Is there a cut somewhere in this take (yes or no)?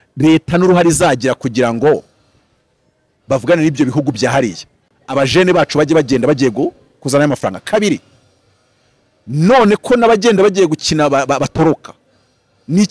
no